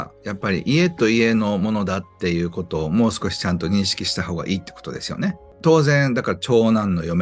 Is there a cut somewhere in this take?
yes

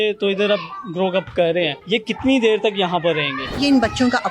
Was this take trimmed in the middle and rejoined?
yes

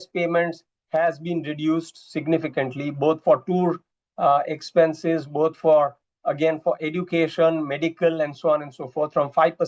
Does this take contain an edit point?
no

